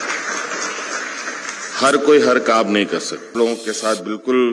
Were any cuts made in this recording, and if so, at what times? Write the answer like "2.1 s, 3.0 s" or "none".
3.3 s